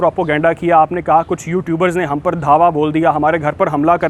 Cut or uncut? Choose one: uncut